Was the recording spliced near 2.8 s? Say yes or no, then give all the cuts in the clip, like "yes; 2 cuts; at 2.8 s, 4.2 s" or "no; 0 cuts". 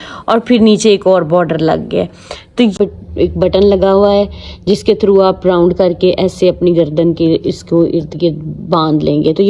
yes; 1 cut; at 2.8 s